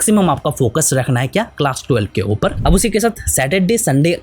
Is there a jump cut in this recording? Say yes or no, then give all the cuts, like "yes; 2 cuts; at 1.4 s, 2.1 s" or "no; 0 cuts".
yes; 1 cut; at 2.6 s